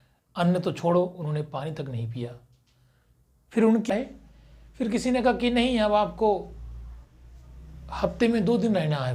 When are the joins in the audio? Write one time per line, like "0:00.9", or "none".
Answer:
0:03.9